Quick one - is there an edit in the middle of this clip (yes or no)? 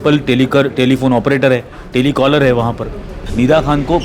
yes